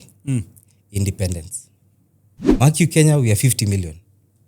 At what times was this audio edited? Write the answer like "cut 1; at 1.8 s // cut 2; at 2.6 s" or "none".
cut 1; at 2.5 s